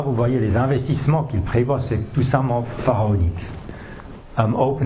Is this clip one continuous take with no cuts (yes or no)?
yes